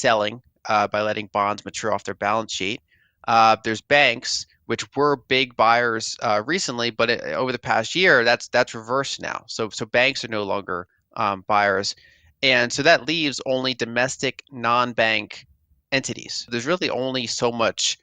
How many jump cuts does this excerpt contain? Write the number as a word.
one